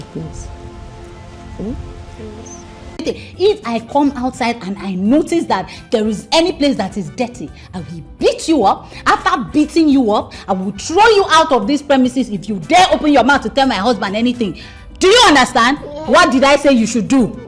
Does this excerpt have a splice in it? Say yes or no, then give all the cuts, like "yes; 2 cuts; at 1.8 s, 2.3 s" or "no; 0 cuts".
yes; 1 cut; at 3.0 s